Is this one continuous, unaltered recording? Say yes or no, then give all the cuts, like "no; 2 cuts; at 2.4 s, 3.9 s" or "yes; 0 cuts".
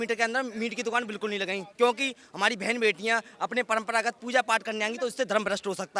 yes; 0 cuts